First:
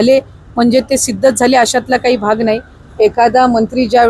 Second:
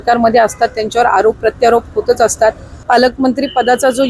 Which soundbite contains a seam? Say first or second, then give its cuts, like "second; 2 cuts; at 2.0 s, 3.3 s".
second; 1 cut; at 2.7 s